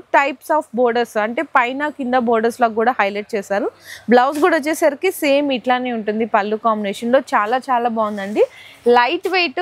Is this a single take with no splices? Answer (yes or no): yes